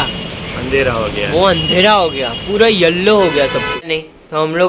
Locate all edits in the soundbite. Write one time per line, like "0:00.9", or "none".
0:03.8